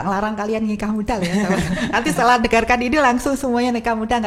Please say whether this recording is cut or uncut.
uncut